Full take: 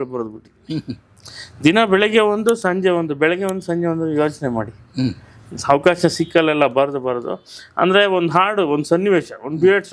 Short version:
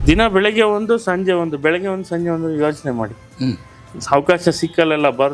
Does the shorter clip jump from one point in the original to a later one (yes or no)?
no